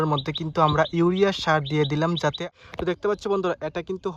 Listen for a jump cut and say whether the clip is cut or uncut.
cut